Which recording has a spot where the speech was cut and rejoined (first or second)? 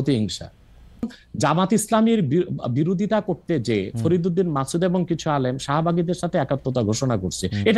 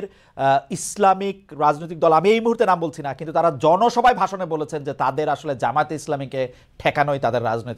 first